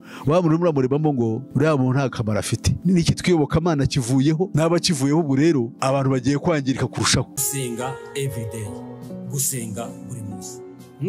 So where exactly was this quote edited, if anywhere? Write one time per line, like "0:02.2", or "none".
0:02.8
0:07.3